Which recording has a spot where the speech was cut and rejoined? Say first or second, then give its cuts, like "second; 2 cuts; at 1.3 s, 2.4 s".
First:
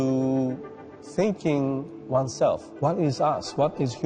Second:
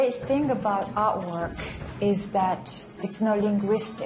second; 1 cut; at 3.0 s